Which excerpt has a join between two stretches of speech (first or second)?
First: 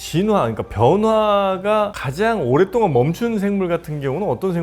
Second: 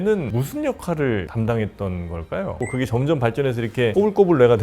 second